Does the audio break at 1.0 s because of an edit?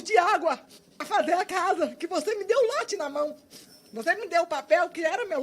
yes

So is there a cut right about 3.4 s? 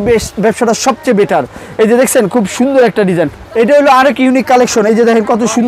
yes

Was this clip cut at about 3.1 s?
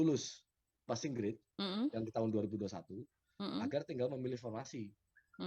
no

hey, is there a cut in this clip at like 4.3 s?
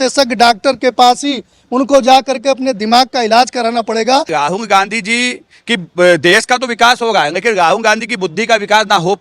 yes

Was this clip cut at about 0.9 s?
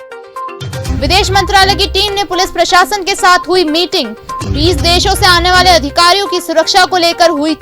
yes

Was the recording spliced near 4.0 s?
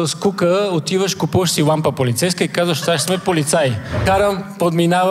yes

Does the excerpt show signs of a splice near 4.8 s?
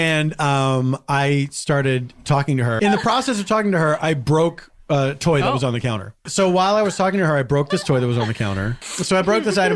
no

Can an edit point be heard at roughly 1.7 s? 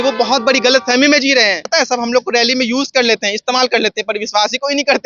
yes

